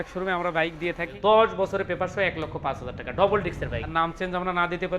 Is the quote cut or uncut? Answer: cut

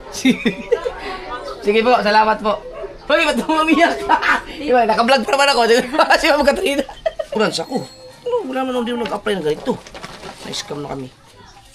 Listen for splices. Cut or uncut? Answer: cut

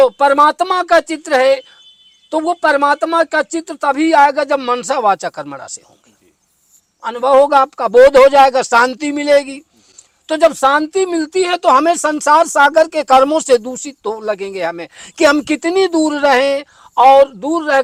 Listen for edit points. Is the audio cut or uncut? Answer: uncut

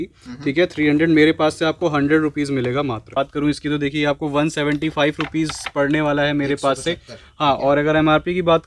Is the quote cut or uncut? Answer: cut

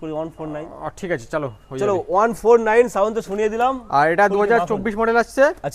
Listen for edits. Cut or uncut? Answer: uncut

